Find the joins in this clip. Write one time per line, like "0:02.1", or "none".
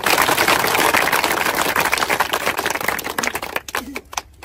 none